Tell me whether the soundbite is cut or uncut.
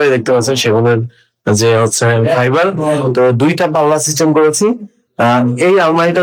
uncut